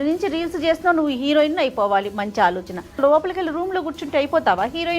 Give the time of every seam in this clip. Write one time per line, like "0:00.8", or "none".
0:03.0